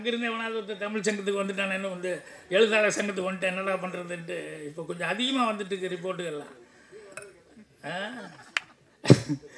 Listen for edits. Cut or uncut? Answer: uncut